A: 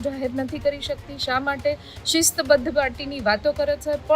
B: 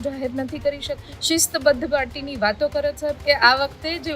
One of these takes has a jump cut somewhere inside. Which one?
B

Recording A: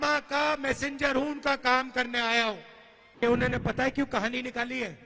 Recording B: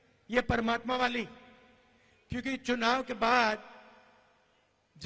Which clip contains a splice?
A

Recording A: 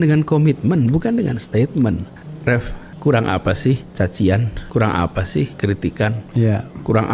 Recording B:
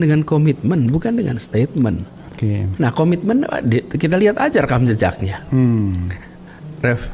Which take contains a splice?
A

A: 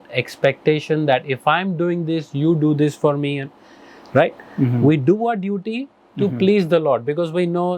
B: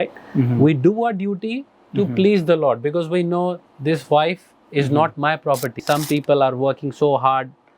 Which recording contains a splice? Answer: B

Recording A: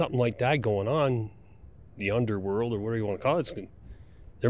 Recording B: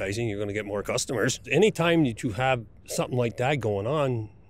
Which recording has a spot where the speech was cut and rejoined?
B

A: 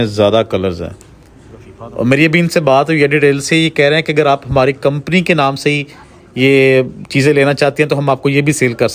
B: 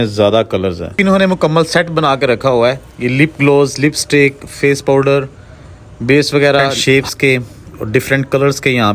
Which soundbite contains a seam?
B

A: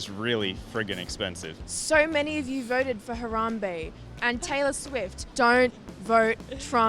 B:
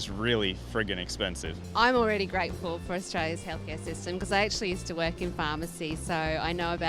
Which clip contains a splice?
A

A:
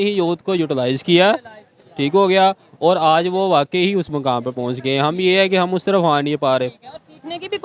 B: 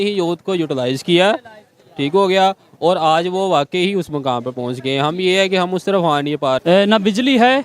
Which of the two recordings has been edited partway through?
B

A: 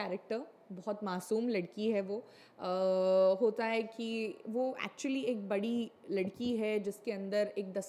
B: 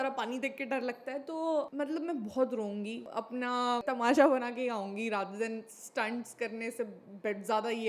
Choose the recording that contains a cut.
B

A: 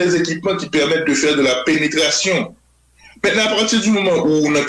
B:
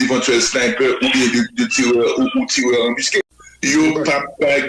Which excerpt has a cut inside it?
B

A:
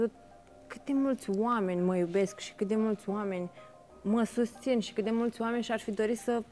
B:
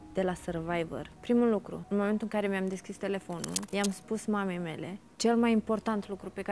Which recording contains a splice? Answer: B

